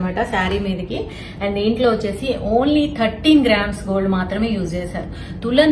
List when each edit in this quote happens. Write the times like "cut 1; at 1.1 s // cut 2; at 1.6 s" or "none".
none